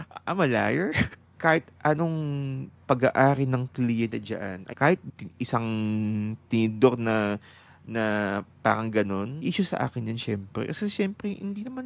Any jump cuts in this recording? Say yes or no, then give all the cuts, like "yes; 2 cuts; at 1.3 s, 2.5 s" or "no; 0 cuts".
yes; 3 cuts; at 1.2 s, 4.6 s, 9.3 s